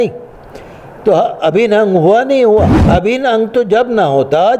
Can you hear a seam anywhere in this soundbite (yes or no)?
yes